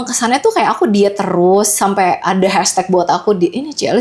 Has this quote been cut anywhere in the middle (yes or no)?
no